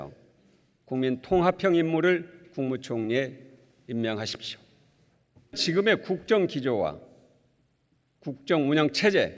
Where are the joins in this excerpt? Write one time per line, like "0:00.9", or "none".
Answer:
0:05.6